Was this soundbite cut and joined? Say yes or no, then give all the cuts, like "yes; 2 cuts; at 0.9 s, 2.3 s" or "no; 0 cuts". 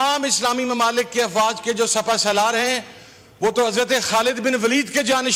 no; 0 cuts